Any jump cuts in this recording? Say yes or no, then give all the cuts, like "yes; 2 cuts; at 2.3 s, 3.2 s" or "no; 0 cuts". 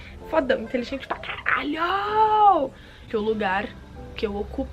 yes; 1 cut; at 2.9 s